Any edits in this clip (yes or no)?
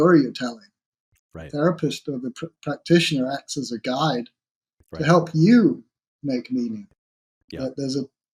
no